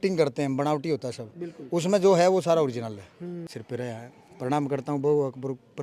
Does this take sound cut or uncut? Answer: cut